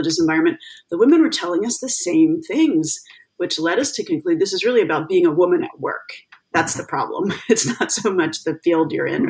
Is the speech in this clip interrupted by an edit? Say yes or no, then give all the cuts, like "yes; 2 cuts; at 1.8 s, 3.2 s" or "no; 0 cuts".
no; 0 cuts